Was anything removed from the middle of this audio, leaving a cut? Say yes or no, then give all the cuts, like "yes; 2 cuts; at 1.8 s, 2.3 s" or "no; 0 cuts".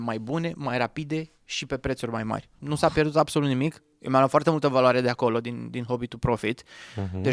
yes; 1 cut; at 2.5 s